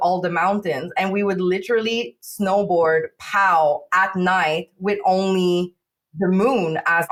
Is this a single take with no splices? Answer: yes; 0 cuts

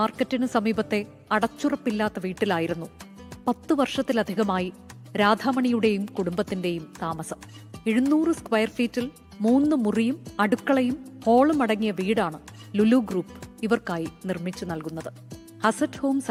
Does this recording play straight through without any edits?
yes; 0 cuts

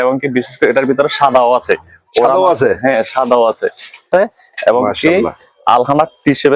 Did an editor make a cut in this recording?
yes; 1 cut; at 4.0 s

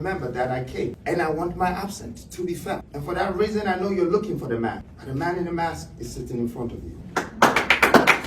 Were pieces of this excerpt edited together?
yes; 4 cuts; at 1.0 s, 2.9 s, 4.9 s, 6.9 s

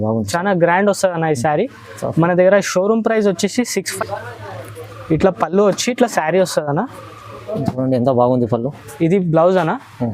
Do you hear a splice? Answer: yes; 1 cut; at 3.9 s

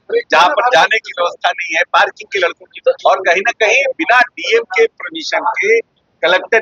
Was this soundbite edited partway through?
yes; 1 cut; at 2.7 s

